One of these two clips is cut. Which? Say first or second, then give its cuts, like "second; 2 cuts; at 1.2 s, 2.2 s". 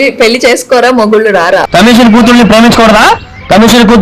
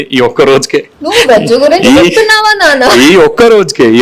second; 1 cut; at 1.0 s